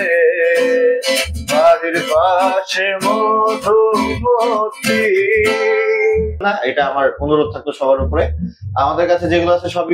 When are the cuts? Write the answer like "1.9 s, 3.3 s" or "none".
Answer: 6.4 s